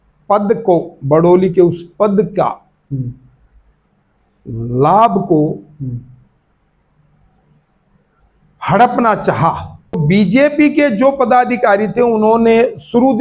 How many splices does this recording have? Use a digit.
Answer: 1